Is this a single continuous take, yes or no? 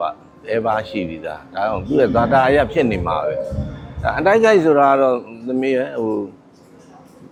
yes